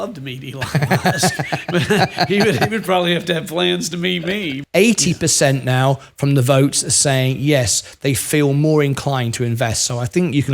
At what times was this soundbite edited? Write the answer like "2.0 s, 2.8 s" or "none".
4.6 s